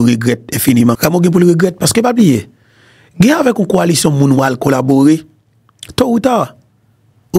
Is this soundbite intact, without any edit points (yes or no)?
no